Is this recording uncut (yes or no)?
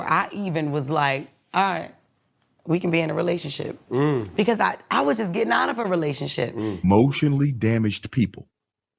no